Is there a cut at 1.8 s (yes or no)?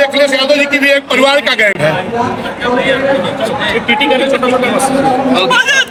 no